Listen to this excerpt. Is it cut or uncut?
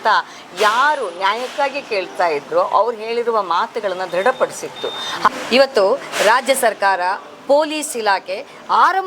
cut